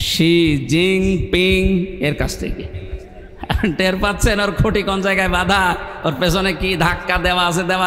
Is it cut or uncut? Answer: uncut